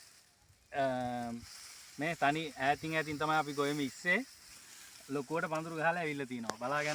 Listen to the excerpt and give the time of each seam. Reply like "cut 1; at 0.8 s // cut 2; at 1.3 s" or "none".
none